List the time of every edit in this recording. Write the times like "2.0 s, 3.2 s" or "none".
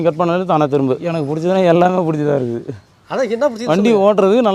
1.0 s